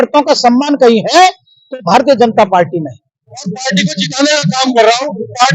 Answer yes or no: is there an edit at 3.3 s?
yes